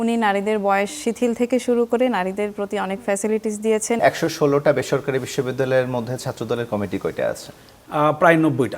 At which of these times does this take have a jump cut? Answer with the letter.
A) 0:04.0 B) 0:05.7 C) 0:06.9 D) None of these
A